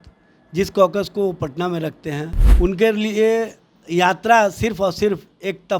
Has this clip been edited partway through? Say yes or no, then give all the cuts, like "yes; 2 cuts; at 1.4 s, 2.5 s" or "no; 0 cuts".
yes; 1 cut; at 2.4 s